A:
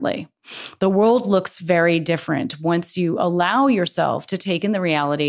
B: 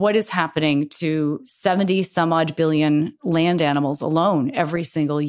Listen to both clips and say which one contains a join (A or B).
B